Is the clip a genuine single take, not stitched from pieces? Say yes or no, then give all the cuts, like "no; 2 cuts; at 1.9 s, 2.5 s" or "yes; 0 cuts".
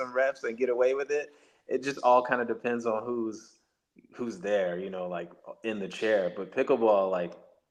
yes; 0 cuts